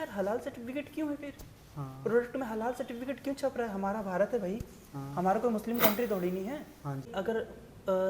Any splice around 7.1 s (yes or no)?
yes